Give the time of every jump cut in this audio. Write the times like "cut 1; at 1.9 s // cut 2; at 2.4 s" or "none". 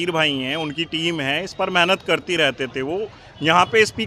none

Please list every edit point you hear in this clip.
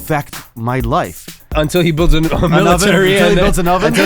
cut 1; at 1.5 s

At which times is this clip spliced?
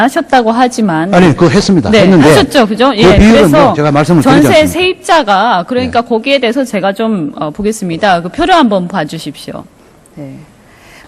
cut 1; at 6.1 s

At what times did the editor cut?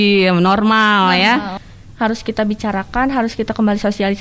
cut 1; at 1.6 s

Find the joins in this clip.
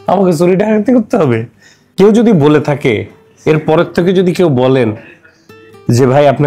cut 1; at 1.8 s

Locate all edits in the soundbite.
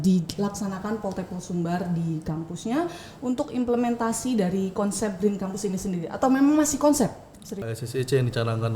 cut 1; at 7.6 s

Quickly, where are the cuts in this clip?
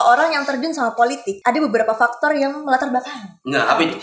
cut 1; at 1.3 s

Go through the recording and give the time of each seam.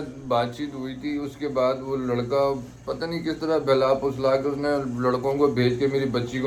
none

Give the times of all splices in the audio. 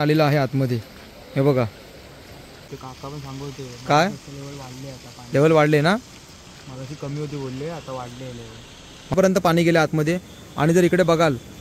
cut 1; at 2.7 s // cut 2; at 9.1 s

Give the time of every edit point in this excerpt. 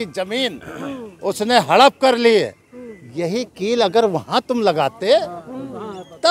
none

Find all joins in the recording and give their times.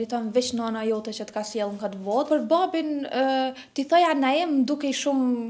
cut 1; at 2.3 s

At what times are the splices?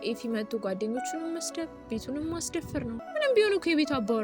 cut 1; at 3.0 s

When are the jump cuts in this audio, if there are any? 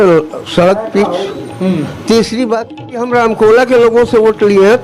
cut 1; at 2.8 s

